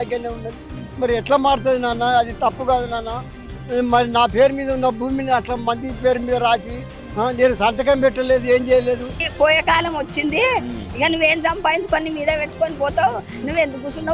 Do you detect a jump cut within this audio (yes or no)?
yes